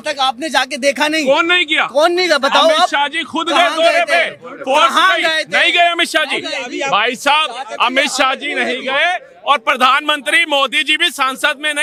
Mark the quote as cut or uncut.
uncut